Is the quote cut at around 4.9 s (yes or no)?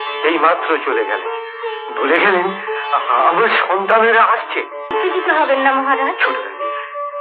yes